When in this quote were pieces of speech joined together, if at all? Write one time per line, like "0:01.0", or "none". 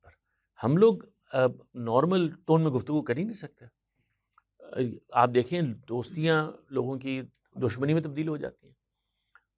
none